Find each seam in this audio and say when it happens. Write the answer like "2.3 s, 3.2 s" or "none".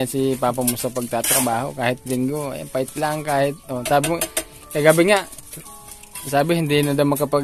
none